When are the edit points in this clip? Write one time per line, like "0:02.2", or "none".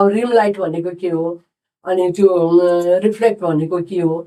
none